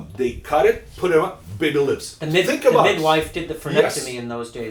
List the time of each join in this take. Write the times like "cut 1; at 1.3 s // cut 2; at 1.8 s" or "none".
none